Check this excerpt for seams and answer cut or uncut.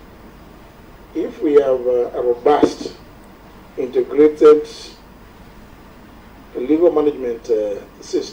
uncut